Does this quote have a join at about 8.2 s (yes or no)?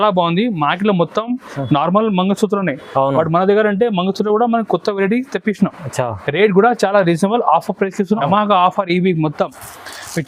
yes